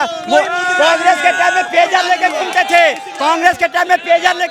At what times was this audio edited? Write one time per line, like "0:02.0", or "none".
none